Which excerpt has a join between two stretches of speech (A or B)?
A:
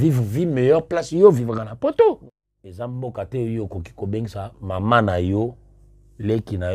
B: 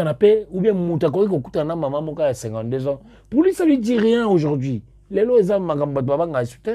A